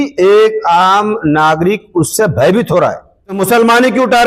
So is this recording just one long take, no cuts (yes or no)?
no